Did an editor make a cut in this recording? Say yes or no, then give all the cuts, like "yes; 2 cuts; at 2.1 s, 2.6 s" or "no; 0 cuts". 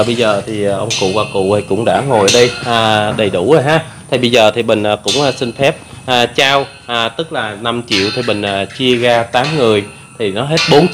no; 0 cuts